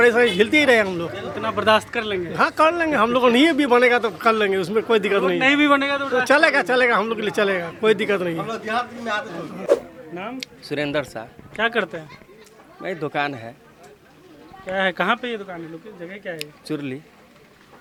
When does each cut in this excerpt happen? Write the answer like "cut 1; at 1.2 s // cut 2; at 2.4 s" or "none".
none